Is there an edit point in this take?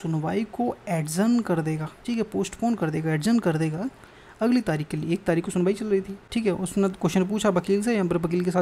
yes; 2 cuts; at 1.9 s, 6.2 s

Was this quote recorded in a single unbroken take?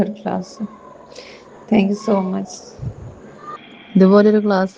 no; 1 cut; at 3.6 s

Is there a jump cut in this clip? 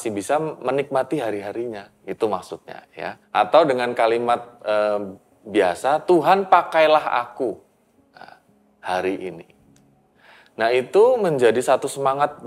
yes; 1 cut; at 3.2 s

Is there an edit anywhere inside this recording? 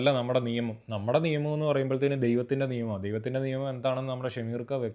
no; 0 cuts

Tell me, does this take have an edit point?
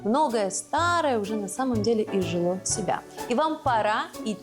no; 0 cuts

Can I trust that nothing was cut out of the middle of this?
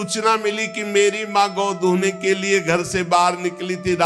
yes; 0 cuts

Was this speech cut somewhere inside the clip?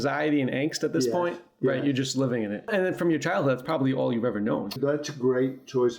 yes; 2 cuts; at 2.7 s, 4.8 s

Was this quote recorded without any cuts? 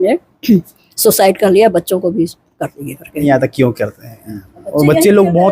no; 1 cut; at 3.2 s

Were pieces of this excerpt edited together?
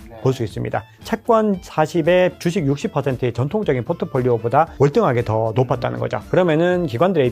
yes; 2 cuts; at 0.9 s, 2.4 s

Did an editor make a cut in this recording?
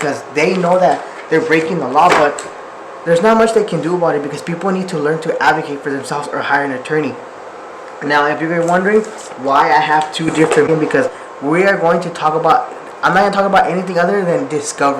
yes; 1 cut; at 10.7 s

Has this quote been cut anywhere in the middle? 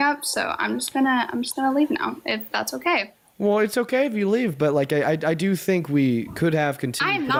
no; 0 cuts

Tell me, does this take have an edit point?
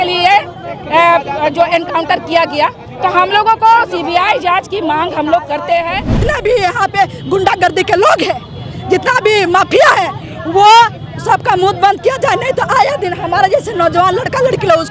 yes; 1 cut; at 6.2 s

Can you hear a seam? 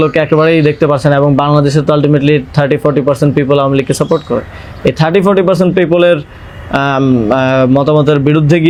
no; 0 cuts

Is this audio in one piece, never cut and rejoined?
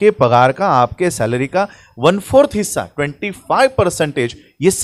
yes; 0 cuts

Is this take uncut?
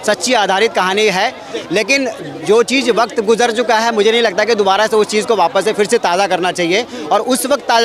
yes; 0 cuts

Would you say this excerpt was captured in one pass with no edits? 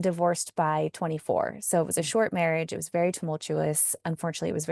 yes; 0 cuts

